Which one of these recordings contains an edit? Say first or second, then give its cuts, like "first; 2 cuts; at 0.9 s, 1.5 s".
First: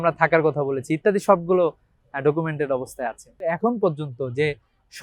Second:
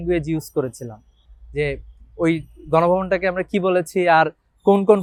first; 1 cut; at 3.3 s